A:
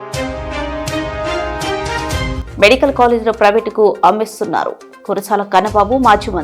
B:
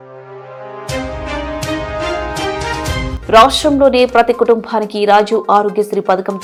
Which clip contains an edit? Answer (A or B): A